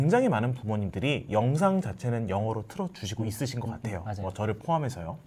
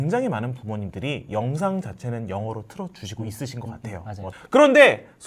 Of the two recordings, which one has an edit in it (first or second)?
second